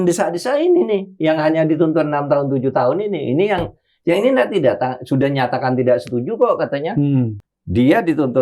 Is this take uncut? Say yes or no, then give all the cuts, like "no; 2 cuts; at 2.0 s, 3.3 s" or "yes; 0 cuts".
no; 1 cut; at 7.5 s